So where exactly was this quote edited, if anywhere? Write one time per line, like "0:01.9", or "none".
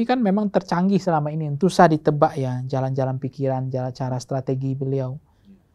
0:01.5